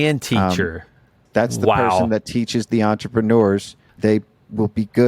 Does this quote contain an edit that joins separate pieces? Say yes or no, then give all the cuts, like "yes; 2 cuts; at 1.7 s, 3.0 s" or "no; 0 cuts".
yes; 2 cuts; at 1.2 s, 3.8 s